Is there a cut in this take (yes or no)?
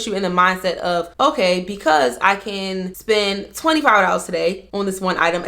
yes